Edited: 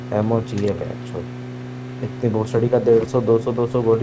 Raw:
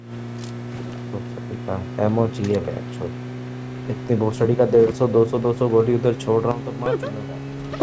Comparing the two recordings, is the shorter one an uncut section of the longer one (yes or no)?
yes